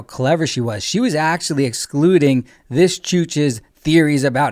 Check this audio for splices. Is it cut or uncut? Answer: uncut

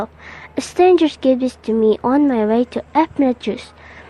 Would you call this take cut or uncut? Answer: cut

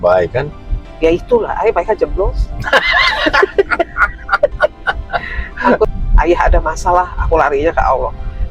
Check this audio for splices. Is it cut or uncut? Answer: cut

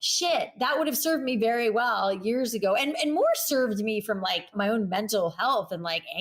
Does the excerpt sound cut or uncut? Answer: cut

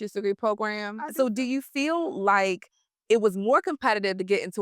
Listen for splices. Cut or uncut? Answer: cut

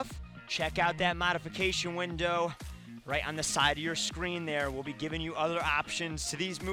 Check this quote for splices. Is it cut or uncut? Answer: uncut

